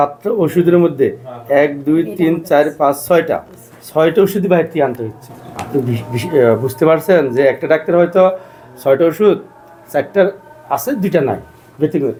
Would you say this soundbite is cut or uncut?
uncut